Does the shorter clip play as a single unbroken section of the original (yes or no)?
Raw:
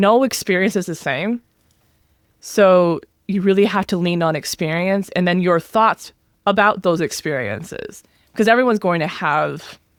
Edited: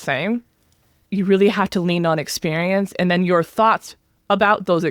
no